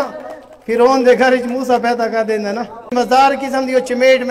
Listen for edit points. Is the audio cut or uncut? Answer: cut